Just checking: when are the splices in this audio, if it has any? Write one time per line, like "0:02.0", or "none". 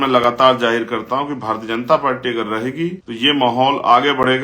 0:03.0

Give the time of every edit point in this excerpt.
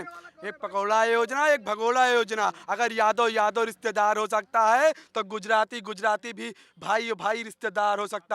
none

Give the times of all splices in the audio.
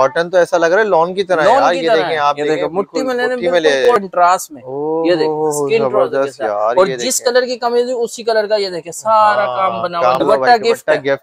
0:03.8
0:10.2

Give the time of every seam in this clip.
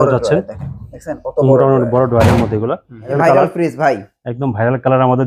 0:03.1

